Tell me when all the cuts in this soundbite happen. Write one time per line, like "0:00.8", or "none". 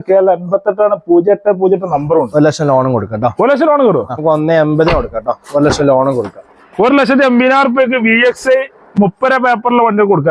0:04.2

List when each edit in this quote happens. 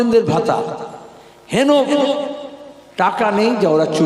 none

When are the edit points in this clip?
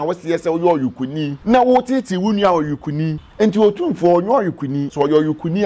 0:01.3
0:03.2
0:04.9

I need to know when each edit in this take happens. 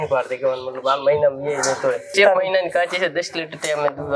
0:02.1

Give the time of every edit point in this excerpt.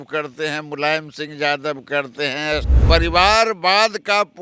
0:02.7

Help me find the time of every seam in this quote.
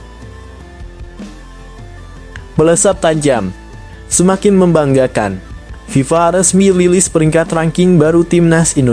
0:02.5

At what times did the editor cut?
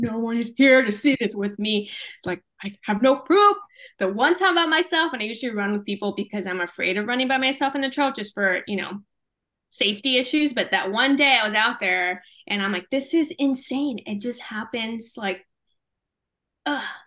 none

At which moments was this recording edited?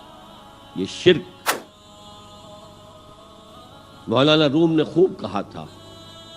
0:01.6

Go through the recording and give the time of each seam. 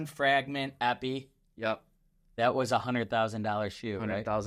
none

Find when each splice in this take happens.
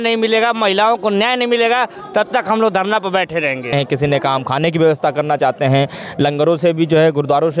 0:03.7

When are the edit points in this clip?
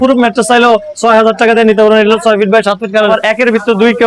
0:03.0

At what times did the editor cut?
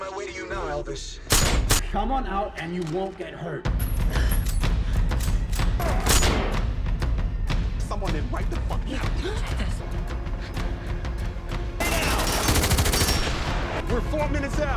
0:09.8

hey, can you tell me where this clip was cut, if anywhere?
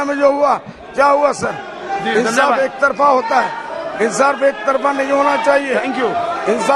none

